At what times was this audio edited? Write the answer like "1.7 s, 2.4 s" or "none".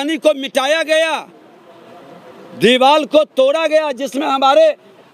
none